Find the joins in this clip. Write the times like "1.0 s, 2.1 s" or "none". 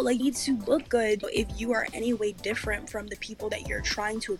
1.2 s